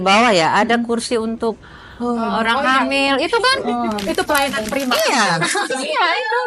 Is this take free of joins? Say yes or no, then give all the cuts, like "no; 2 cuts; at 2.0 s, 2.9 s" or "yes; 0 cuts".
yes; 0 cuts